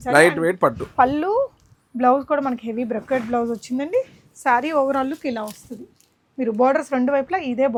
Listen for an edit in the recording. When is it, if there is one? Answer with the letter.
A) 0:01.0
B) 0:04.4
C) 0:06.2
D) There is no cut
D